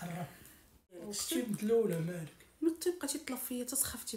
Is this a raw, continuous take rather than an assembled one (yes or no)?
no